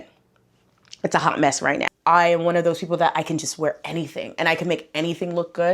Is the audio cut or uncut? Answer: cut